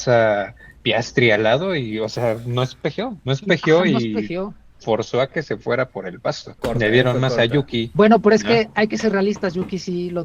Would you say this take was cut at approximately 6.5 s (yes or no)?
yes